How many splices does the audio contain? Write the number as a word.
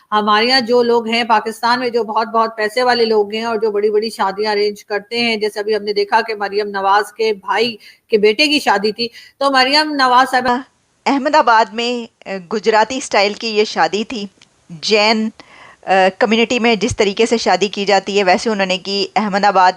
one